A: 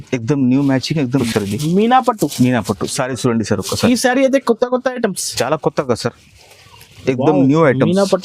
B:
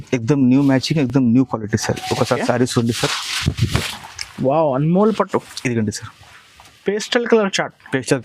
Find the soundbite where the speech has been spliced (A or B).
A